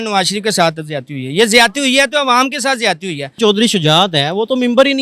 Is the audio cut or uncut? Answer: cut